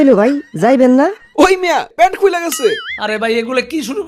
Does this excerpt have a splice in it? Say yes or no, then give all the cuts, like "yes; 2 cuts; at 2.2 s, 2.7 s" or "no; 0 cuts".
no; 0 cuts